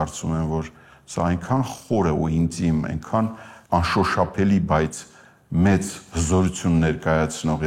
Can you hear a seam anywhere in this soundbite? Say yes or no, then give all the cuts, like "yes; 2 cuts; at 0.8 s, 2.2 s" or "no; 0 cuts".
yes; 1 cut; at 3.5 s